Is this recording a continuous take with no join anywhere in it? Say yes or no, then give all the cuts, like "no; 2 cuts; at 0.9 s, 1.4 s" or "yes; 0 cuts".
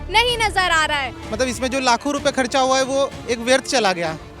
no; 1 cut; at 1.2 s